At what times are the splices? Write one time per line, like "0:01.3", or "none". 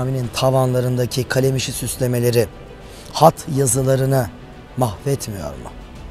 none